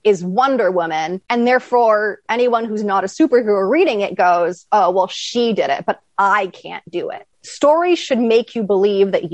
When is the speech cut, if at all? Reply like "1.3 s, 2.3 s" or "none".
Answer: none